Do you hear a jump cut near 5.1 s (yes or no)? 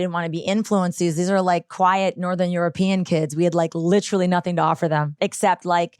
yes